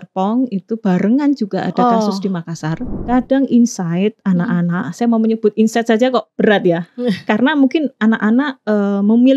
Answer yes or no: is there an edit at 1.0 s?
no